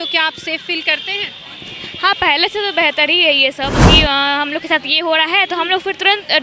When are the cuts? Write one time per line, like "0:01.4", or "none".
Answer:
0:03.9